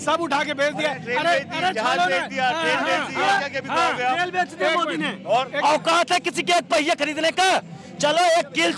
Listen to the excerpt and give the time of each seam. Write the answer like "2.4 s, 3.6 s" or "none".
none

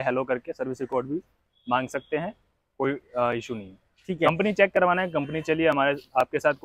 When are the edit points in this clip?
none

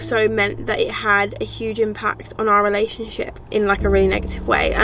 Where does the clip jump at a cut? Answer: 3.5 s

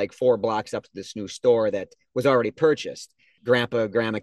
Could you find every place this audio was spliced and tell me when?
3.3 s

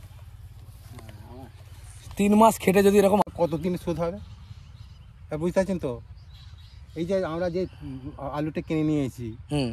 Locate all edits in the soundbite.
3.2 s

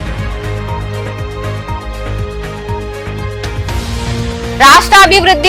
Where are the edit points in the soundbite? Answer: 3.5 s

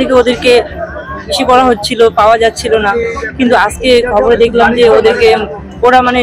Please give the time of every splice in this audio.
none

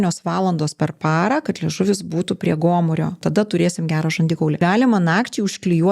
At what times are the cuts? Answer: 3.2 s, 4.6 s

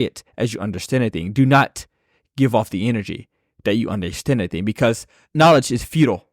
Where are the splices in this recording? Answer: 5.3 s

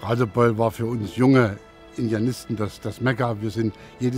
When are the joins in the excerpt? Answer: none

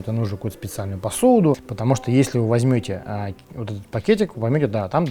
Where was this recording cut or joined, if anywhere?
1.7 s

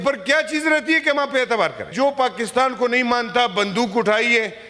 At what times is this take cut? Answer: 1.9 s

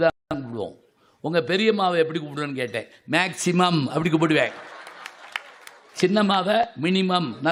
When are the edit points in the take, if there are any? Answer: none

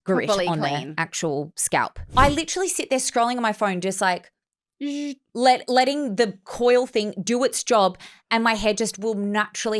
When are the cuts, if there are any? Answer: 2.1 s

